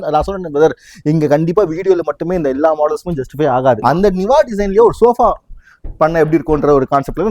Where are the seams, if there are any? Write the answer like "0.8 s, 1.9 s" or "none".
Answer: 3.8 s